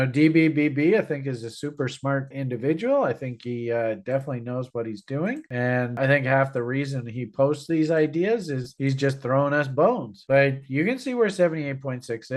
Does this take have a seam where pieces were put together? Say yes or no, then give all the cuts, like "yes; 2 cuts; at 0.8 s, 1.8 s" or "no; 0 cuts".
yes; 2 cuts; at 2.3 s, 5.9 s